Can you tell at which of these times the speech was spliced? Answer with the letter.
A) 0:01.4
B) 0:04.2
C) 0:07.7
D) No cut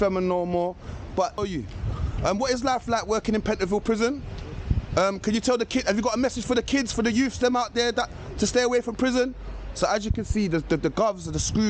A